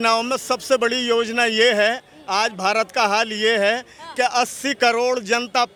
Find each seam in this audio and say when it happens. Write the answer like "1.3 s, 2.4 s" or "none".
none